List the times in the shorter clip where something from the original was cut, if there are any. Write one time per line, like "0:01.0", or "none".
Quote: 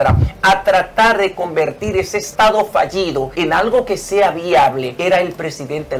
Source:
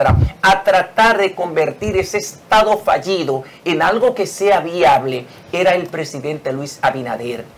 0:02.2
0:03.3
0:04.9

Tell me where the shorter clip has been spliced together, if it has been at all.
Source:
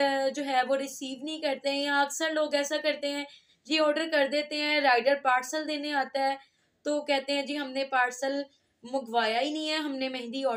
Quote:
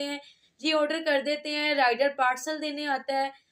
none

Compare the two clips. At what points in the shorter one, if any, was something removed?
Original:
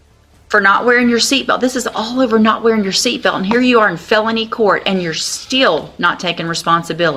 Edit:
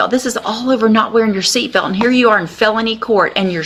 none

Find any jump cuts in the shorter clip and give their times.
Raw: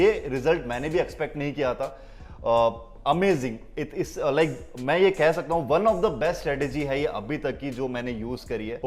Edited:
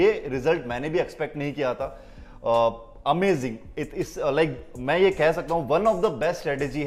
none

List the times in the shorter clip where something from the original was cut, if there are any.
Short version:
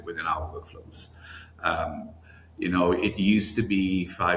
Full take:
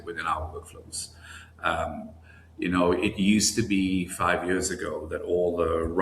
none

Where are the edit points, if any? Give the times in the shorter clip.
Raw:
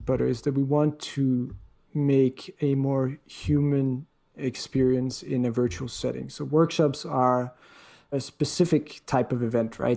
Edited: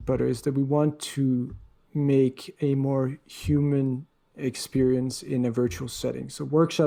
none

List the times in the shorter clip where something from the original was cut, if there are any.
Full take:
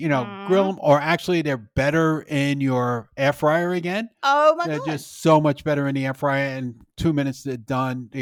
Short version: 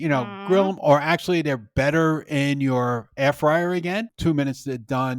0:04.1

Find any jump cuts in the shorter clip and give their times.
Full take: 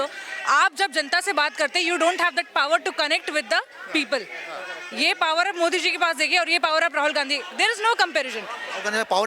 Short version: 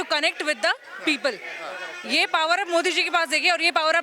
none

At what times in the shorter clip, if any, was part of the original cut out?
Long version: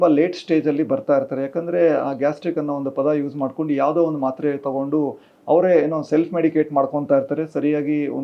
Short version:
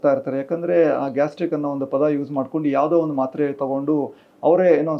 none

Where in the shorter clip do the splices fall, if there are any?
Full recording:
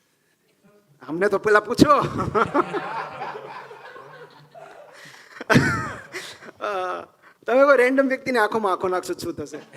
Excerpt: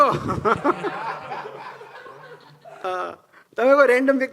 0:02.8

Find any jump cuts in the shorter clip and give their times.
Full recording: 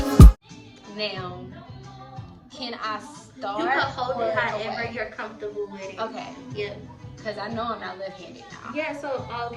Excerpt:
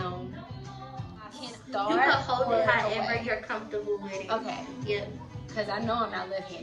0:01.4

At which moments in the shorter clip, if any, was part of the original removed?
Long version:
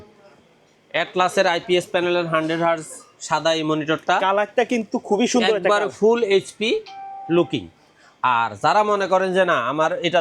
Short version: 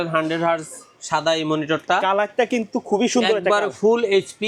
none

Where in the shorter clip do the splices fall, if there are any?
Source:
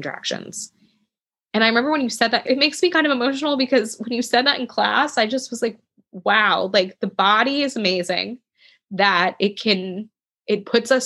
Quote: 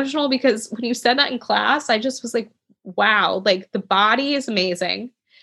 none

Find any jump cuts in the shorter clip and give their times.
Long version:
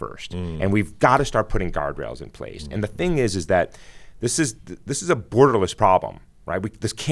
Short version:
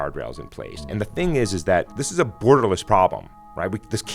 0:02.0

